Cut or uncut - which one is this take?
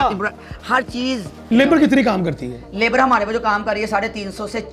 cut